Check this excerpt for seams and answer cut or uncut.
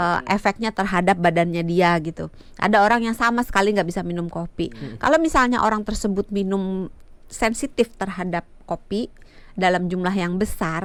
uncut